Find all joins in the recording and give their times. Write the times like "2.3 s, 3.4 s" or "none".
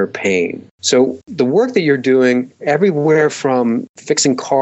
1.0 s, 2.5 s